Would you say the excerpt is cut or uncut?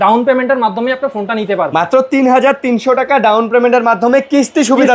uncut